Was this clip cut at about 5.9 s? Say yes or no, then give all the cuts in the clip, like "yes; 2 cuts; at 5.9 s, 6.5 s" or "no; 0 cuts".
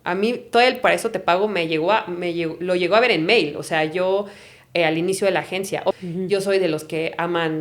yes; 1 cut; at 5.9 s